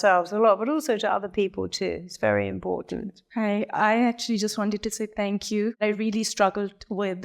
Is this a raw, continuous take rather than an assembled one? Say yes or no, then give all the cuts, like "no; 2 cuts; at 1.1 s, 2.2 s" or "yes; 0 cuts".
no; 2 cuts; at 3.2 s, 5.8 s